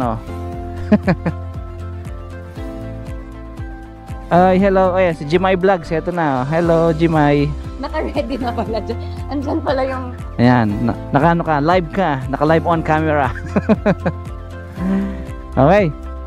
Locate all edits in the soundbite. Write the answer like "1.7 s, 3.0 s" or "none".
1.3 s, 4.3 s